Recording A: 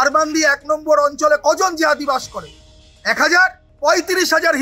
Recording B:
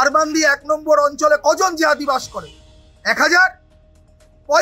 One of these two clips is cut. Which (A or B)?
A